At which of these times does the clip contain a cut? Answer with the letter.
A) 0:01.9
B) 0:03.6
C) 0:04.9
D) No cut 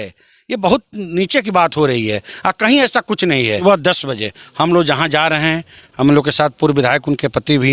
B